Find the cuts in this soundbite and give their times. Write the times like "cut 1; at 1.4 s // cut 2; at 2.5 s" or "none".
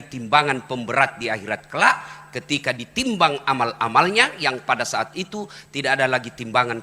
none